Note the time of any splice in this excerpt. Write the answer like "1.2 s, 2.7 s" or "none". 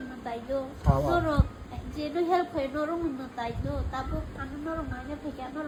none